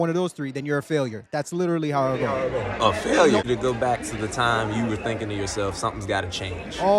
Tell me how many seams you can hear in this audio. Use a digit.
1